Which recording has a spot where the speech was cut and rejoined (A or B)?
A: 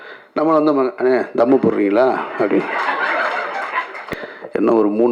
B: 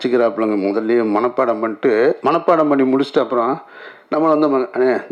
A